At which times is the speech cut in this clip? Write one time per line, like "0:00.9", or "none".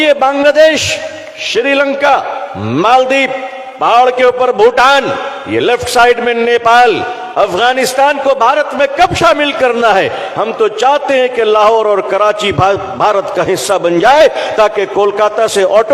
none